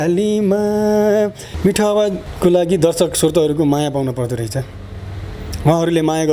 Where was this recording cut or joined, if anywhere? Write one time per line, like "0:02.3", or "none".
0:01.4
0:02.3